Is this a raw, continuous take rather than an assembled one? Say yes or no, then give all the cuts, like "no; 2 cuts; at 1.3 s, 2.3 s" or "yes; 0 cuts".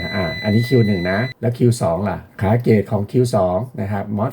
no; 2 cuts; at 1.3 s, 2.3 s